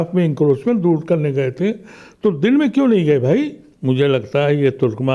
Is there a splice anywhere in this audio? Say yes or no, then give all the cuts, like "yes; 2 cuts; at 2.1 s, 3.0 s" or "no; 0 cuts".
yes; 1 cut; at 3.7 s